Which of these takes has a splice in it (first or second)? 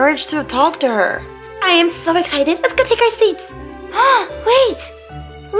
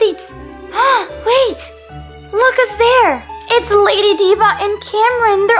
first